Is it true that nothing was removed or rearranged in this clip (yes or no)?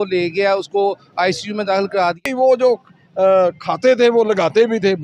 no